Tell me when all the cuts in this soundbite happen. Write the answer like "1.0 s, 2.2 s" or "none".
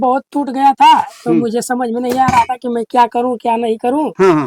none